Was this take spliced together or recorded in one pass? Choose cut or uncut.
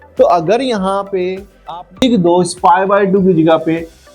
uncut